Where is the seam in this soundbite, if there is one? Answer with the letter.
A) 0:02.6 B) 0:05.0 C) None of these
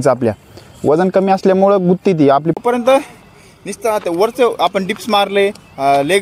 A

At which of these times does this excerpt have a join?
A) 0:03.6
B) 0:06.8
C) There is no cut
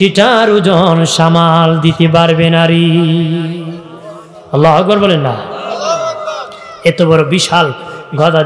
C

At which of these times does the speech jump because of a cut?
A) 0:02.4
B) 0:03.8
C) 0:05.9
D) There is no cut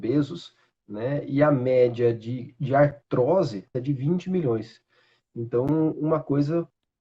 B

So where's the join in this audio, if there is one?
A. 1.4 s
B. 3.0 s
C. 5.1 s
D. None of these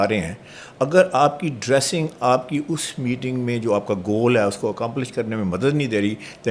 D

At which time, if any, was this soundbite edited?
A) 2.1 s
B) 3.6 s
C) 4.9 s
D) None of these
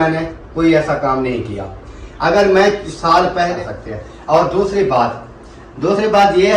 B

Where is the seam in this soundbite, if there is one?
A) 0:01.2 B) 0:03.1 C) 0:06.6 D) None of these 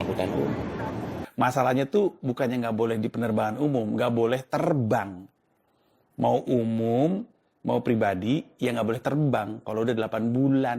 A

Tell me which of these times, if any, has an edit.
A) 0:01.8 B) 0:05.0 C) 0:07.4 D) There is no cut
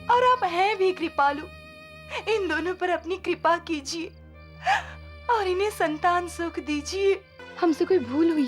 C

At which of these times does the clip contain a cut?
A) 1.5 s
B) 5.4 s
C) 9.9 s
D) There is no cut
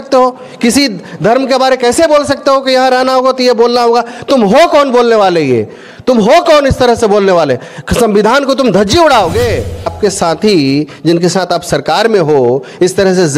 C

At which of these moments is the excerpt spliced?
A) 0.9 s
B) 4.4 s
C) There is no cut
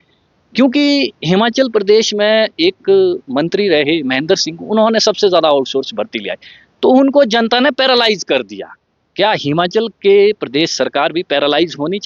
C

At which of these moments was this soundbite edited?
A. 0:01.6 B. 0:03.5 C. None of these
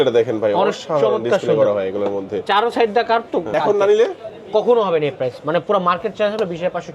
B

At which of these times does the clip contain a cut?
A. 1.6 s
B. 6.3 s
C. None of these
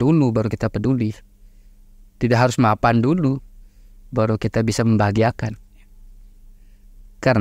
C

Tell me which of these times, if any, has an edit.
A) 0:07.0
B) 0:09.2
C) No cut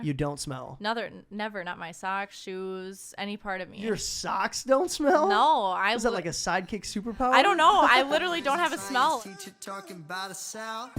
B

